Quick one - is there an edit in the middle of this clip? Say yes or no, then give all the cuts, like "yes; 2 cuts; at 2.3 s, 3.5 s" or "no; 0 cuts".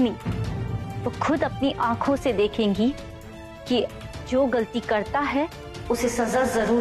no; 0 cuts